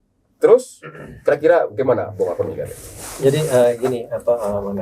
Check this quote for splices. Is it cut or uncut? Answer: uncut